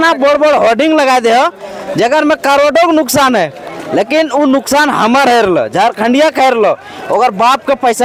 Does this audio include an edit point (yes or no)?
no